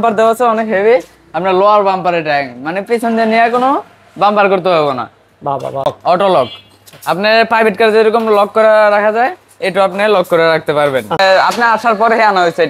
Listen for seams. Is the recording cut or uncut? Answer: cut